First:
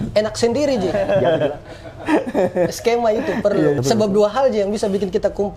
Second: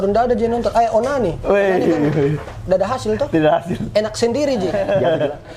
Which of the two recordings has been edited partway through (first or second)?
first